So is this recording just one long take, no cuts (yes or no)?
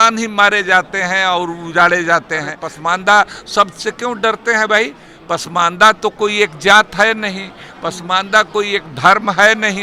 no